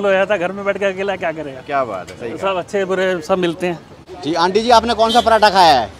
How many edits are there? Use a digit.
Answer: 1